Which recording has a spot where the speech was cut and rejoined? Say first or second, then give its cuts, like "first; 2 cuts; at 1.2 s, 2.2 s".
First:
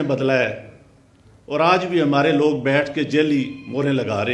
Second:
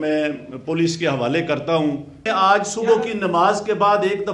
second; 1 cut; at 2.3 s